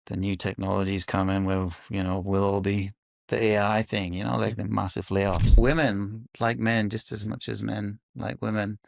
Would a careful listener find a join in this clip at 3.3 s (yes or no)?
no